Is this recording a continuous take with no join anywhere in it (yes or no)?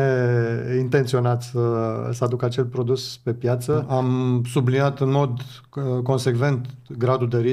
no